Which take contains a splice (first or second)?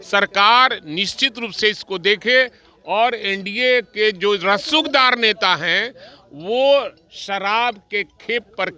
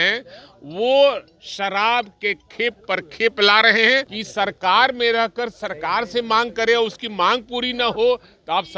second